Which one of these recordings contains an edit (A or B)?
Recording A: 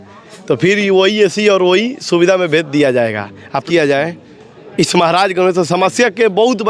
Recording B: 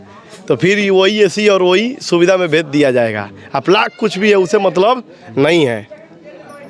A